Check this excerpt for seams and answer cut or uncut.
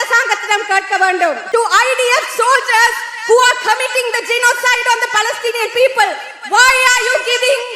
cut